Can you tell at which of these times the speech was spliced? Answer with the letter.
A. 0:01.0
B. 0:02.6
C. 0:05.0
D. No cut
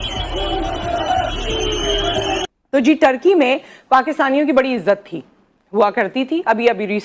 B